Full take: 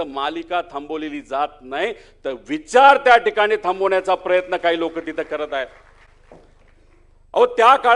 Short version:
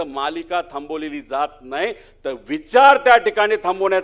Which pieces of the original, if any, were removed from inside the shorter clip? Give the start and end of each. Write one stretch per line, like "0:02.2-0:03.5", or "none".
none